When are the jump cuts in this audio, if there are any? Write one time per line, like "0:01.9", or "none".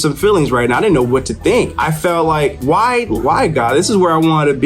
0:01.7
0:03.2